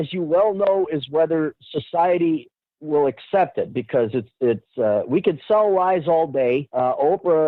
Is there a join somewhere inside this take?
no; 0 cuts

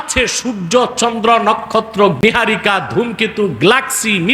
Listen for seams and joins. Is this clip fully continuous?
no; 1 cut; at 2.2 s

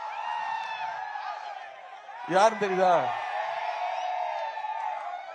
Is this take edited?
no; 0 cuts

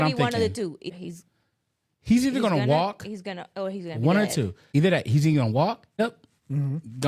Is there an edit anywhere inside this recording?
yes; 3 cuts; at 0.9 s, 4.6 s, 6.0 s

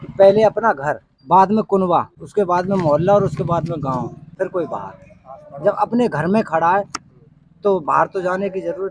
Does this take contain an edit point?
yes; 3 cuts; at 1.1 s, 2.2 s, 4.2 s

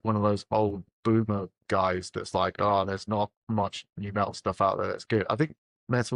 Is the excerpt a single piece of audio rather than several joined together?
yes; 0 cuts

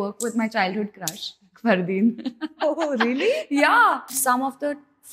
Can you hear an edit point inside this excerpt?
yes; 1 cut; at 4.2 s

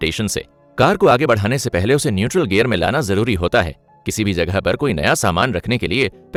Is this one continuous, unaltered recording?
yes; 0 cuts

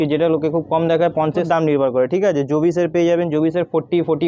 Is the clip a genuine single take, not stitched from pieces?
no; 1 cut; at 1.4 s

